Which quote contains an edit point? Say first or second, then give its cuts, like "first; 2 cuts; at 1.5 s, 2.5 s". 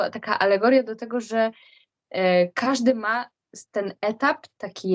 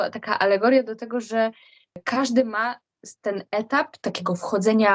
second; 2 cuts; at 2.0 s, 4.0 s